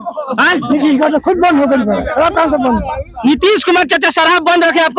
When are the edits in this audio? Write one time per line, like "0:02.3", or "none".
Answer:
none